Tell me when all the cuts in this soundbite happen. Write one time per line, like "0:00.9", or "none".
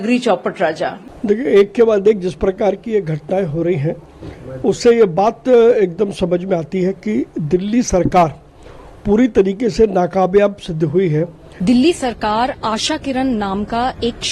0:01.0
0:11.4